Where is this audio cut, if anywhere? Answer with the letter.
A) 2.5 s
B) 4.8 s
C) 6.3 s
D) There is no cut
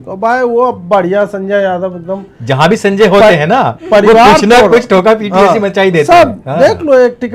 D